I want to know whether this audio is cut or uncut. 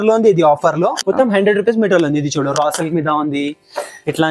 cut